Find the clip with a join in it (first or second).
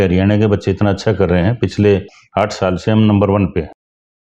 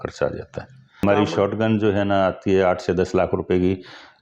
second